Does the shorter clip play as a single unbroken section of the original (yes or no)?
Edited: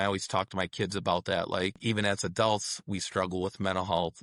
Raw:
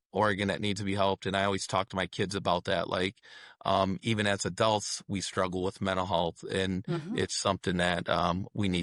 no